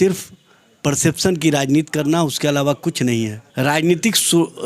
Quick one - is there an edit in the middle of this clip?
yes; 1 cut; at 3.4 s

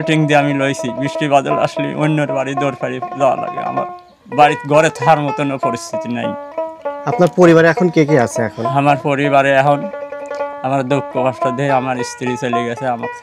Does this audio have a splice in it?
no; 0 cuts

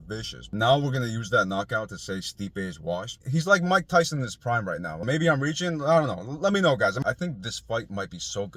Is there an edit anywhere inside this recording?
yes; 3 cuts; at 3.2 s, 5.0 s, 7.0 s

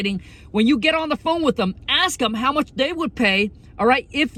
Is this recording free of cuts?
yes; 0 cuts

